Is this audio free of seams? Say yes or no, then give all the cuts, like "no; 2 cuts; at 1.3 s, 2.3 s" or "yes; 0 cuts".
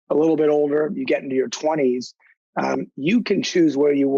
yes; 0 cuts